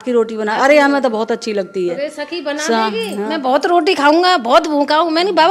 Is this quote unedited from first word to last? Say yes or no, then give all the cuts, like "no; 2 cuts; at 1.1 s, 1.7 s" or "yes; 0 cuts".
yes; 0 cuts